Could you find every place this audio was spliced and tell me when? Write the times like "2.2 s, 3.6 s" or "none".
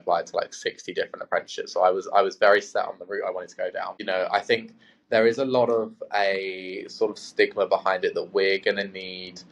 3.9 s